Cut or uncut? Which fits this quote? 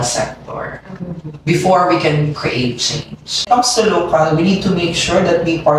cut